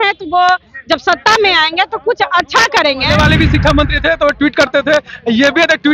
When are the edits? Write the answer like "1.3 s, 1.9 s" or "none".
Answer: 3.1 s